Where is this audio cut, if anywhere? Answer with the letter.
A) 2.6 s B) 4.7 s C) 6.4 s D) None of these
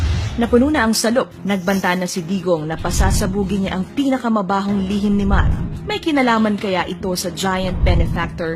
A